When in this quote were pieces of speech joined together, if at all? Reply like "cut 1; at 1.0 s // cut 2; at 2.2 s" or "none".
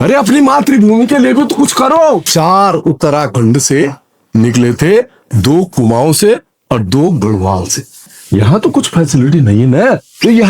cut 1; at 2.3 s // cut 2; at 8.2 s